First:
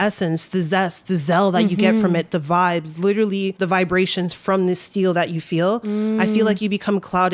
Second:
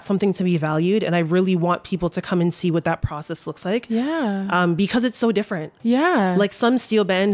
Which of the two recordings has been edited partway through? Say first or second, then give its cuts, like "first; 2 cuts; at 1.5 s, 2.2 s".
first; 1 cut; at 3.5 s